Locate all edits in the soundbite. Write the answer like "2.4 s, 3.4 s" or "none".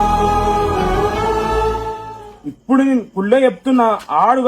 2.2 s